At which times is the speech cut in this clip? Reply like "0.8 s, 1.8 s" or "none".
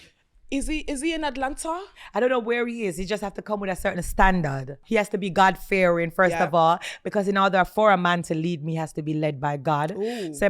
4.8 s